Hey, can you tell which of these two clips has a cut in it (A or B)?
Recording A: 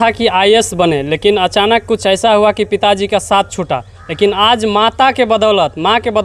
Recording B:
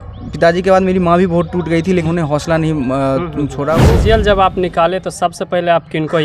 B